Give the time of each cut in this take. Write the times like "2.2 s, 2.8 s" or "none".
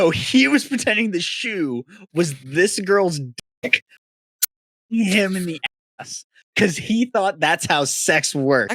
none